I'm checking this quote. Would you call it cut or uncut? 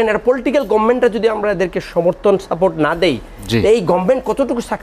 uncut